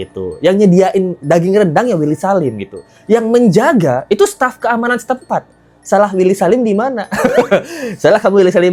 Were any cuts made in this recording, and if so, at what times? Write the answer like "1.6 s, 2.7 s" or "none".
none